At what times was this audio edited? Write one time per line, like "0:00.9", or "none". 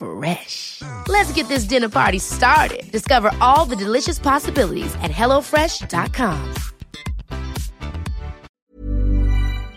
0:08.5